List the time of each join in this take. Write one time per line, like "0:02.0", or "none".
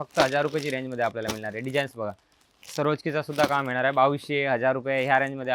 none